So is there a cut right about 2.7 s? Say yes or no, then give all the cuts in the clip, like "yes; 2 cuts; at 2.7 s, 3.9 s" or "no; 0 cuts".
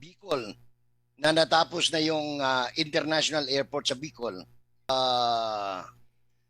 no; 1 cut; at 4.9 s